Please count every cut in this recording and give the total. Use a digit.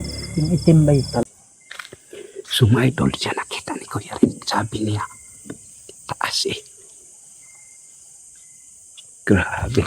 1